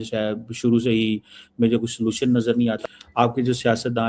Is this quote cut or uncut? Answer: cut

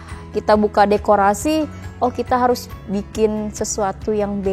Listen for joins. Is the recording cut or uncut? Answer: uncut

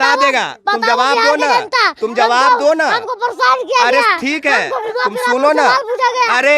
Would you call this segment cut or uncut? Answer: uncut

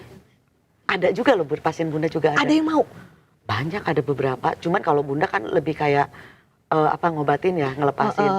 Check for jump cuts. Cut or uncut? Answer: uncut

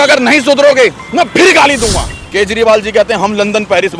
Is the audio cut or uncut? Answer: cut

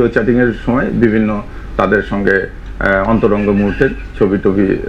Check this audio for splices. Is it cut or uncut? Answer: uncut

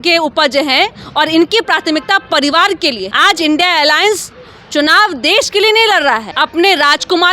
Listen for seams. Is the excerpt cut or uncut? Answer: cut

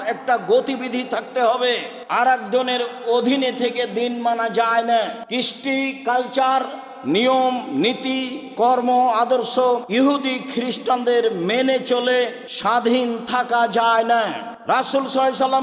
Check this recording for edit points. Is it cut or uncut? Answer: cut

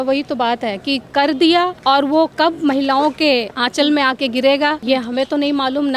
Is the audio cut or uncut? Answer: cut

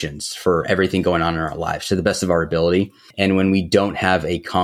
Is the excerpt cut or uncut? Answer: uncut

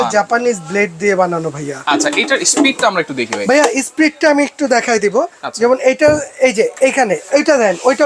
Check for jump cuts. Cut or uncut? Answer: uncut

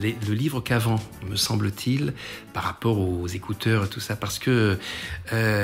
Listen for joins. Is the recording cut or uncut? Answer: uncut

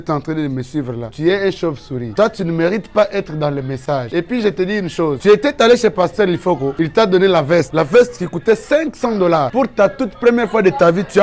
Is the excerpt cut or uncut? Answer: uncut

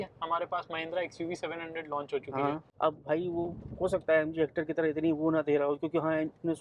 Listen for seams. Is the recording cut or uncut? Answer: cut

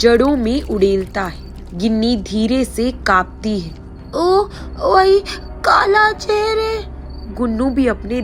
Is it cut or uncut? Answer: uncut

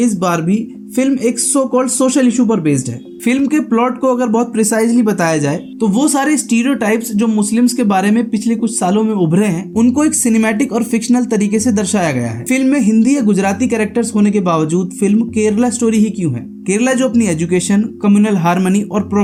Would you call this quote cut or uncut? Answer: uncut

